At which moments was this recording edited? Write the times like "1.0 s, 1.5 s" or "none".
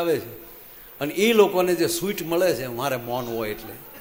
none